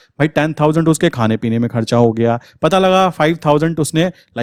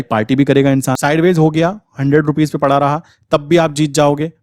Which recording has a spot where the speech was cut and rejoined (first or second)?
second